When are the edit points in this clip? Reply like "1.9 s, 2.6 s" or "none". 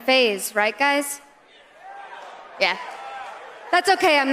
none